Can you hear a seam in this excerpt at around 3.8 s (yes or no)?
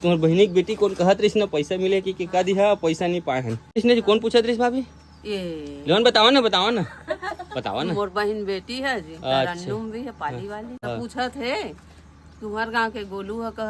yes